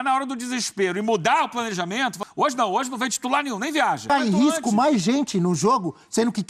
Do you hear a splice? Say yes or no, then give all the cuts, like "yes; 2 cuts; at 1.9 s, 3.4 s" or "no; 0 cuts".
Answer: yes; 2 cuts; at 2.2 s, 4.0 s